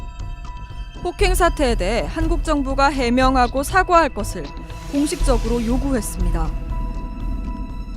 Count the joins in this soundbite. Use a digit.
1